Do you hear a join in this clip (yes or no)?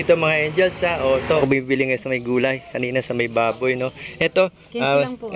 yes